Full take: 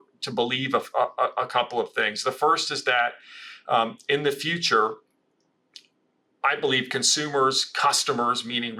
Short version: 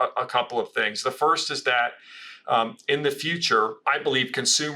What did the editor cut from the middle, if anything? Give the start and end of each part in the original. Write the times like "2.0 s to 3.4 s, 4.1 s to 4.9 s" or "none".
5.0 s to 6.3 s